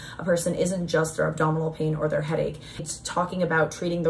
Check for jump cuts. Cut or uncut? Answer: cut